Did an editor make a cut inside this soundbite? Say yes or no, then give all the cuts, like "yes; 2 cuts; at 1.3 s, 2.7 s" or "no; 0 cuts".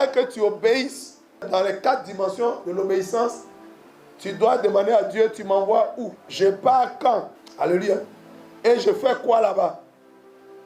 yes; 3 cuts; at 1.5 s, 6.2 s, 7.4 s